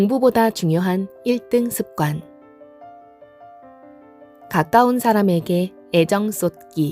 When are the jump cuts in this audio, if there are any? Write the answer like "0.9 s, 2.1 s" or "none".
2.2 s, 4.0 s

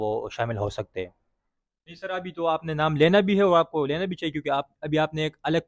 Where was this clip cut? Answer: 1.9 s

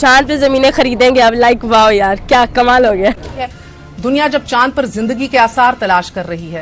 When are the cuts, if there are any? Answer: 3.2 s

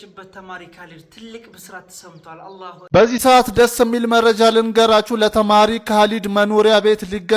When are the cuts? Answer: 2.8 s

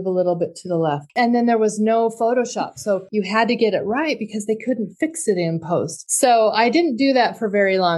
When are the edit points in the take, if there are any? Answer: 1.1 s, 3.1 s, 6.0 s

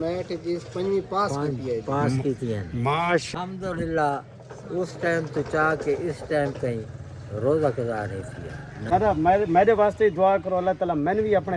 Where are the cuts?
3.3 s, 8.7 s

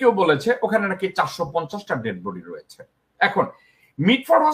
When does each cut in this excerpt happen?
none

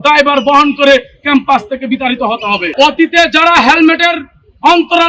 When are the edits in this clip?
2.7 s

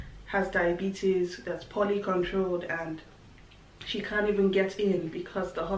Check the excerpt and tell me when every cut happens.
none

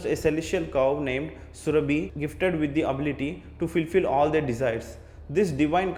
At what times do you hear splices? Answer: none

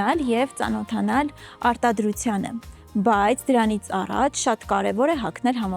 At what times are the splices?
none

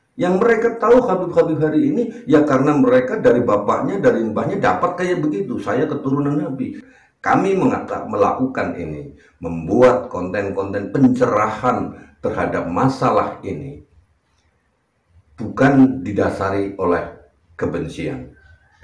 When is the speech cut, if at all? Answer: 6.8 s

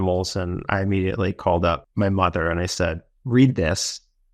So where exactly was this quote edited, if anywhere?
1.8 s

